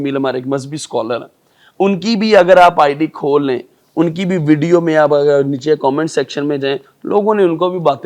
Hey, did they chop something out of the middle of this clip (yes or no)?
no